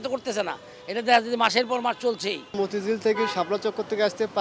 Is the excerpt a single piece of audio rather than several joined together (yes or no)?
no